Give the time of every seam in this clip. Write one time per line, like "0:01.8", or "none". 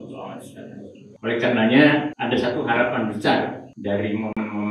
0:01.0
0:02.1
0:03.7

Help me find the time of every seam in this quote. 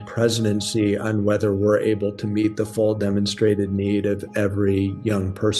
none

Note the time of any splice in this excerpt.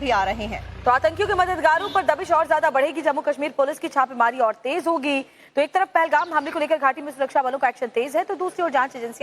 0:05.8

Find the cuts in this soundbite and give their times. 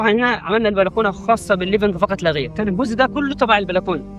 0:02.5

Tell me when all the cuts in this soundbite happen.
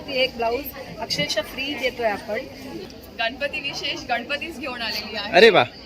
0:02.9

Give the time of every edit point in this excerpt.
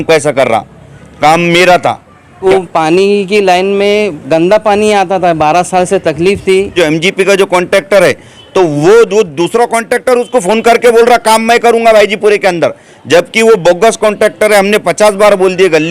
0:02.4
0:06.8

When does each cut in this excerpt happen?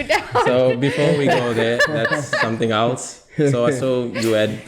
none

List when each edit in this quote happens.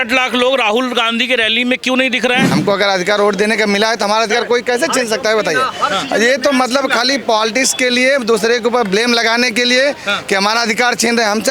0:02.5

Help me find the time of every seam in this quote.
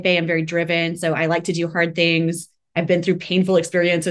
none

